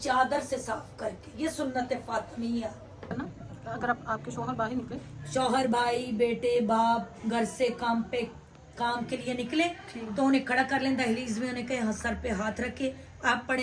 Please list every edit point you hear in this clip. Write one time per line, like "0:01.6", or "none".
0:03.1